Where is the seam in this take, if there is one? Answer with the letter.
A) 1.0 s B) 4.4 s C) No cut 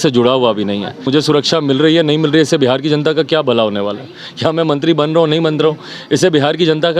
A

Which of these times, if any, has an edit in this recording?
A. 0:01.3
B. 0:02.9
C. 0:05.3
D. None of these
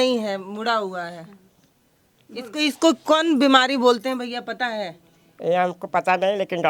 D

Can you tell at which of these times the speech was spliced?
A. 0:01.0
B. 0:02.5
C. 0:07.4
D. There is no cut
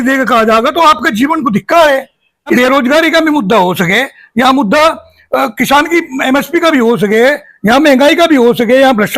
B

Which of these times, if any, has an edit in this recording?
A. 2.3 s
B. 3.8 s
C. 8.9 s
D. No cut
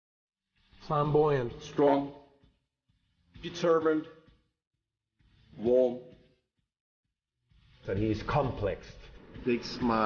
D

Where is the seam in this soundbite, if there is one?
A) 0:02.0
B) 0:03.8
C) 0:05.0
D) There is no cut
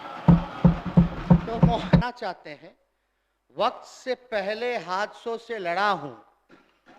A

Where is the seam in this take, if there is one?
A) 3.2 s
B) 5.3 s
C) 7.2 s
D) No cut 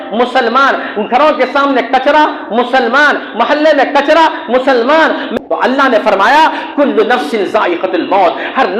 B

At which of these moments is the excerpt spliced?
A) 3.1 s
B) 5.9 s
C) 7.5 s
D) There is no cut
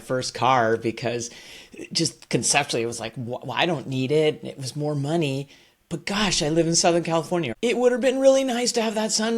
C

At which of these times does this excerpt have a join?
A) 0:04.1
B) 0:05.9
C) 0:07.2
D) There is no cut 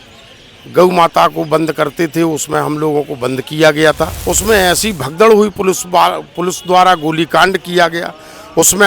A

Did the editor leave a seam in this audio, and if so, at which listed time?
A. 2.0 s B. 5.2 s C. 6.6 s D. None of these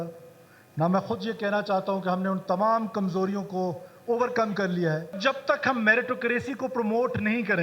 B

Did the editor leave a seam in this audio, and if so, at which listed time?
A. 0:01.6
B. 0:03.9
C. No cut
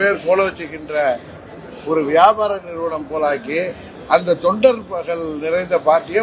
B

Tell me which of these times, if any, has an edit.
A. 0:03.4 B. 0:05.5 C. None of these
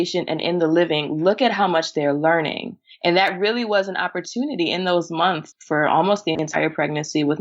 B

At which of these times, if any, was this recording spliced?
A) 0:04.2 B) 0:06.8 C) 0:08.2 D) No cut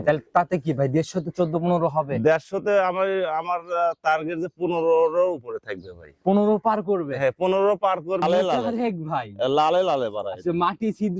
C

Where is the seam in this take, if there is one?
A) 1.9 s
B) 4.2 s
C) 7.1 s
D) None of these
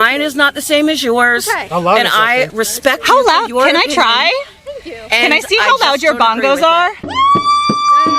C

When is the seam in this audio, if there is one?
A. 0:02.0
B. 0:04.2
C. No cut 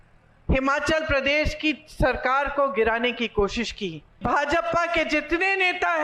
B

